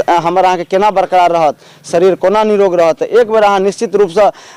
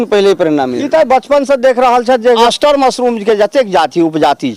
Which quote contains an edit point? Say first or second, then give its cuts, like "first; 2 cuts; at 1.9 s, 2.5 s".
second; 1 cut; at 2.4 s